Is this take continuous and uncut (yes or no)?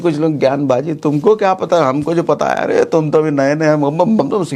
yes